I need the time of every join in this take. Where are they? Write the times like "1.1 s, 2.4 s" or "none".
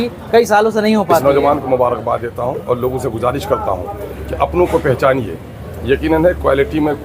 1.2 s